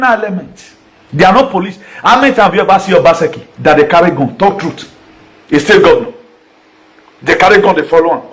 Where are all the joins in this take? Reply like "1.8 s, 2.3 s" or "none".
none